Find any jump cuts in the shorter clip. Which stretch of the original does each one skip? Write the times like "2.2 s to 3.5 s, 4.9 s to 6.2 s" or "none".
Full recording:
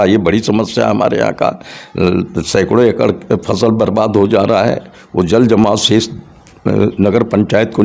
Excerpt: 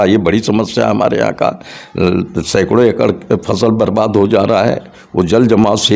none